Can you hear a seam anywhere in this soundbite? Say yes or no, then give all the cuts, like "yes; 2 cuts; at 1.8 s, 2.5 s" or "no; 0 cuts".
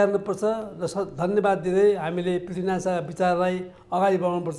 no; 0 cuts